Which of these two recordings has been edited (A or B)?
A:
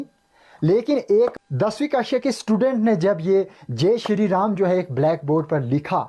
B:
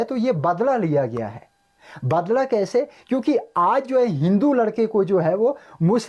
A